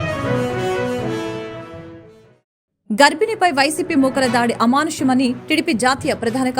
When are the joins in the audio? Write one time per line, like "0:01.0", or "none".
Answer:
0:01.2
0:03.0